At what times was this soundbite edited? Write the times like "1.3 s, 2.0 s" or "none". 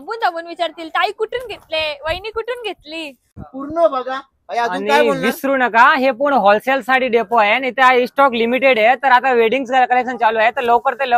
3.3 s